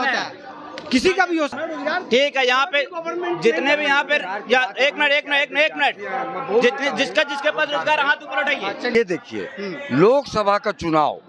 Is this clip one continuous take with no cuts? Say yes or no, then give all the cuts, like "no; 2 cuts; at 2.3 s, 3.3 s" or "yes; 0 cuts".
no; 2 cuts; at 1.6 s, 8.9 s